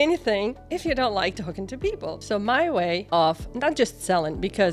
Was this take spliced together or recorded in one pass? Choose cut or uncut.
uncut